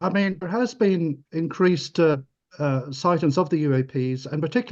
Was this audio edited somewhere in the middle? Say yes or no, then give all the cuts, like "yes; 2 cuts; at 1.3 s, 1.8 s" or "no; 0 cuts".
no; 0 cuts